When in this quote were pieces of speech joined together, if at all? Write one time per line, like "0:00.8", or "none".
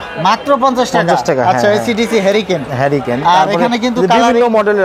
none